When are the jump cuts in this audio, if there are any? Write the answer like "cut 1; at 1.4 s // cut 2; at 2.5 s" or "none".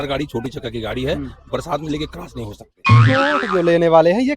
cut 1; at 3.0 s

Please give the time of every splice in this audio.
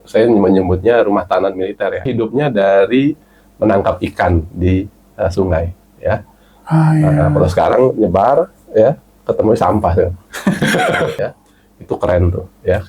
cut 1; at 2.0 s // cut 2; at 11.2 s

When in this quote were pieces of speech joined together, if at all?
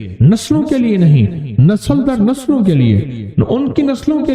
none

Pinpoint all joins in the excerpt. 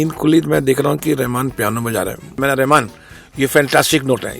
cut 1; at 2.4 s

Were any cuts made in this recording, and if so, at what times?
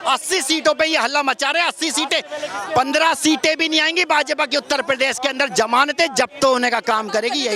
none

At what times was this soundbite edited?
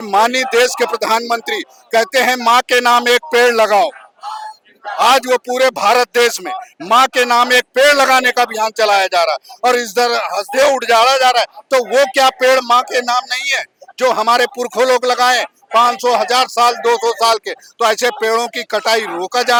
none

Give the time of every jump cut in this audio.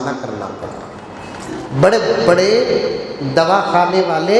cut 1; at 1.4 s

